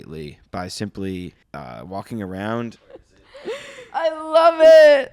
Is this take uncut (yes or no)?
no